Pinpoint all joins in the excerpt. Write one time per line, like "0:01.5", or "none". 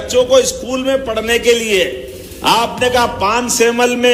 none